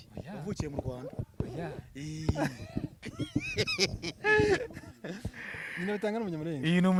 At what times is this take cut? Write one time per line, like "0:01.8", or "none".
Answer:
none